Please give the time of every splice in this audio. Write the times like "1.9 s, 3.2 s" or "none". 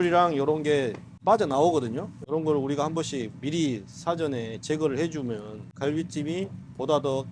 2.2 s, 5.6 s